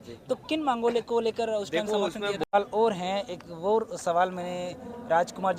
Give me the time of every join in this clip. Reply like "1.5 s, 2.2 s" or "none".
2.5 s